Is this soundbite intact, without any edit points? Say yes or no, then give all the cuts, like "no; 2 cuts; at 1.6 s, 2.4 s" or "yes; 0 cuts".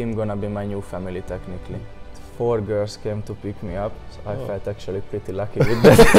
no; 1 cut; at 2.1 s